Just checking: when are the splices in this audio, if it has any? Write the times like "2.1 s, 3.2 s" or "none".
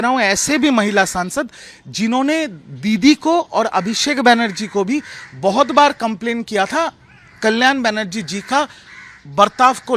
none